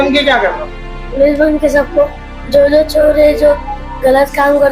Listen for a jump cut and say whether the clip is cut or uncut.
uncut